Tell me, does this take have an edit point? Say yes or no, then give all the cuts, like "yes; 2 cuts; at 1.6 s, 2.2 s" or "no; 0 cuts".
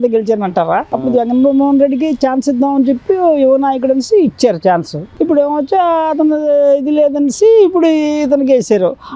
no; 0 cuts